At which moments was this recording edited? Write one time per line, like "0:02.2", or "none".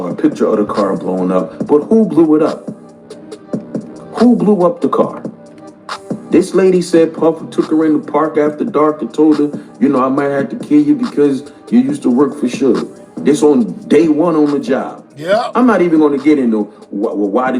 0:16.6